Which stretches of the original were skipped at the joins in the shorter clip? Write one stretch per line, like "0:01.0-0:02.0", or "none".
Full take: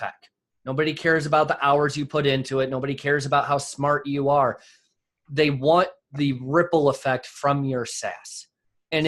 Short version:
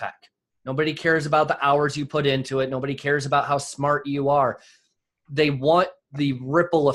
none